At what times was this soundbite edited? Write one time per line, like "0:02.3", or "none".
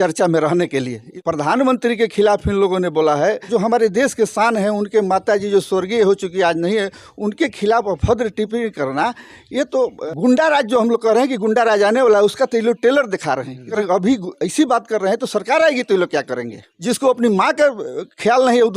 0:01.1
0:03.4
0:10.0
0:13.7
0:16.7